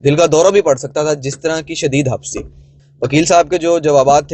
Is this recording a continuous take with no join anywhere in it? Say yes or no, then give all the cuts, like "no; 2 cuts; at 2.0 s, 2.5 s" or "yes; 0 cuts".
no; 1 cut; at 2.7 s